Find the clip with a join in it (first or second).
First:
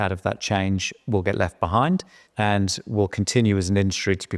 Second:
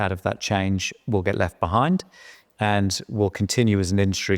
first